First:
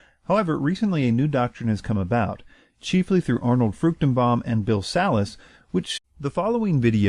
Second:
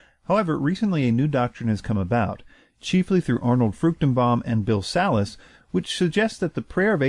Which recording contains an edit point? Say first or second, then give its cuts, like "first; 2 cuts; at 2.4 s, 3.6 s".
second; 1 cut; at 6.0 s